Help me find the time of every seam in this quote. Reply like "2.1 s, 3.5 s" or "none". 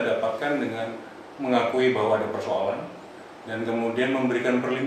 none